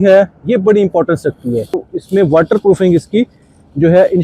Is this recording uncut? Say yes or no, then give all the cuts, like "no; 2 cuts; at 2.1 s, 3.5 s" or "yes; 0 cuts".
no; 1 cut; at 1.9 s